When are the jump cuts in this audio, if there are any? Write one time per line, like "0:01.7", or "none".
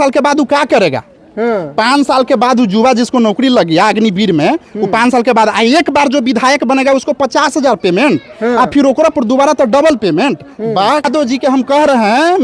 0:11.0